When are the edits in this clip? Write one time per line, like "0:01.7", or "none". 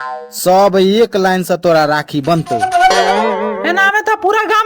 0:03.0